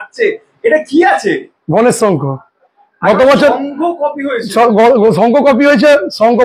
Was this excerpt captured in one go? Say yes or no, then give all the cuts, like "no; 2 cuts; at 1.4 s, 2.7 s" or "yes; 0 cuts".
yes; 0 cuts